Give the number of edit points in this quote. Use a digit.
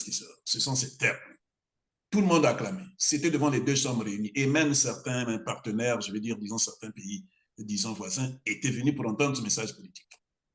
0